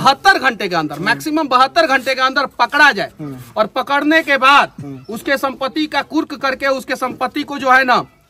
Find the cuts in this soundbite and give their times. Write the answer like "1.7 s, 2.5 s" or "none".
none